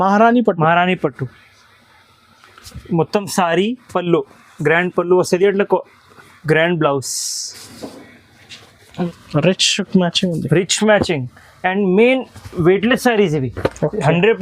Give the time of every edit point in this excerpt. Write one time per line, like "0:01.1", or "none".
0:09.1